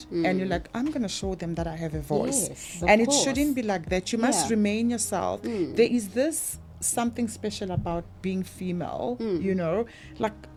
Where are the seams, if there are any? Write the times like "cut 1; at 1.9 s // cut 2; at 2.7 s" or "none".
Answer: none